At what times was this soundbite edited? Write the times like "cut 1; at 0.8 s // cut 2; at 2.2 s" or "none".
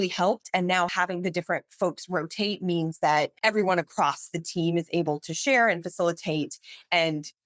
cut 1; at 0.9 s // cut 2; at 3.3 s

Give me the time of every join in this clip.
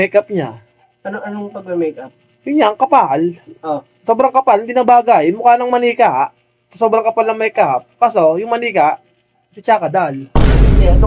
none

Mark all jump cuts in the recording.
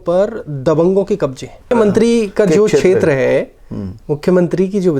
cut 1; at 1.7 s

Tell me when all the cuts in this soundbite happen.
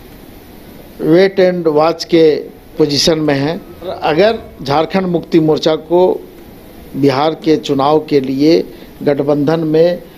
cut 1; at 3.9 s

